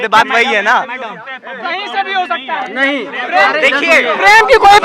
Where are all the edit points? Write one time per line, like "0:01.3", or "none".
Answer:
none